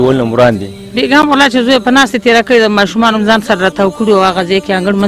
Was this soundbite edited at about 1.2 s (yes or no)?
yes